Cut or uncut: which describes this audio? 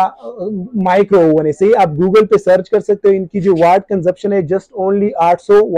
uncut